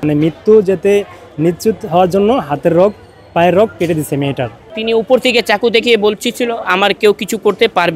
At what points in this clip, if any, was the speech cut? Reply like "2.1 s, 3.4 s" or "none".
4.7 s